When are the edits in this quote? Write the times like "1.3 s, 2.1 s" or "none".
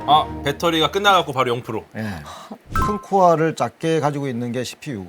2.7 s